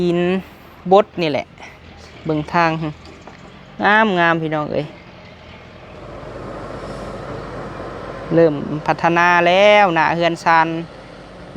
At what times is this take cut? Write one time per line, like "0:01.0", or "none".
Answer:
0:06.0